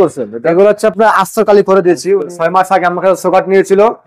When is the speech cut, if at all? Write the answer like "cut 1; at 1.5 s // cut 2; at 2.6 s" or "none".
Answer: cut 1; at 2.4 s